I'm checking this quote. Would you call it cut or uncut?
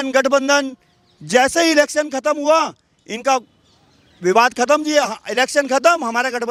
uncut